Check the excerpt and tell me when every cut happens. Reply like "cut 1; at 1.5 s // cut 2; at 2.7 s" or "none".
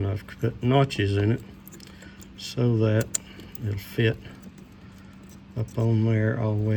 none